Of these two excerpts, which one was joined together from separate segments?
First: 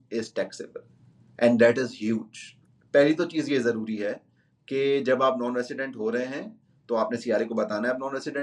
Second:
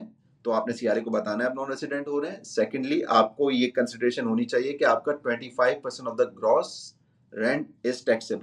first; 1 cut; at 2.5 s

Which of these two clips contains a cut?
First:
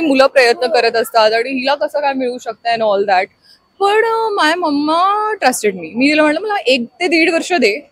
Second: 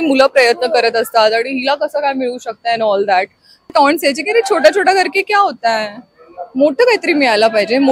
second; 1 cut; at 3.7 s

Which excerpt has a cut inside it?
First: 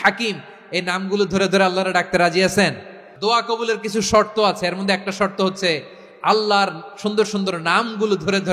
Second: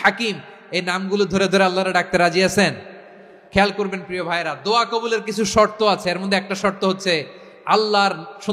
first; 1 cut; at 3.1 s

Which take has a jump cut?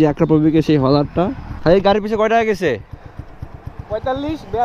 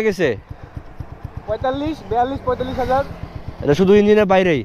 first; 1 cut; at 1.5 s

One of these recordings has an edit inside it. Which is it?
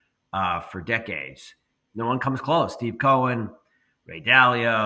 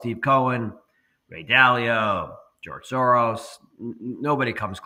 first; 1 cut; at 1.8 s

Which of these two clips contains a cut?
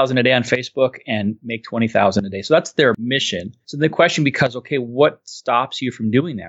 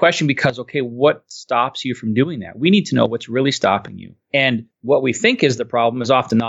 first; 1 cut; at 2.9 s

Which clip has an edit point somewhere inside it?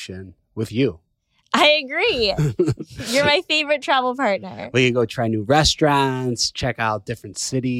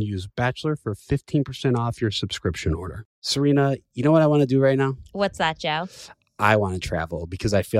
second; 1 cut; at 3.0 s

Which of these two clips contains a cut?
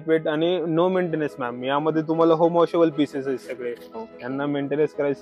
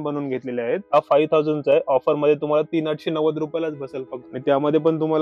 second; 2 cuts; at 0.8 s, 4.2 s

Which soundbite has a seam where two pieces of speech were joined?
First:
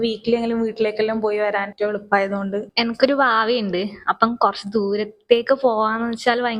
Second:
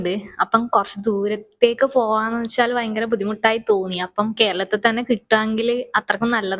first; 2 cuts; at 1.7 s, 2.7 s

